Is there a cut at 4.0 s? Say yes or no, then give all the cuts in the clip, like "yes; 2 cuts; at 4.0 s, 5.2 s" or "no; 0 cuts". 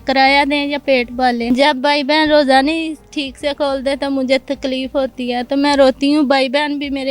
no; 1 cut; at 1.5 s